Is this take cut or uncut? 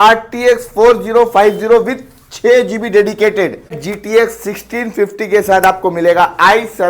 cut